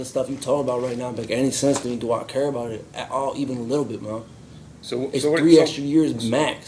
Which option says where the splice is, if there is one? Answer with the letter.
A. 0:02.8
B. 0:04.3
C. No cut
C